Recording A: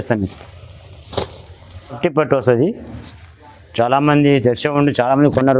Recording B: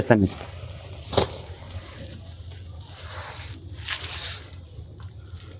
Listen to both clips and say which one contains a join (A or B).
A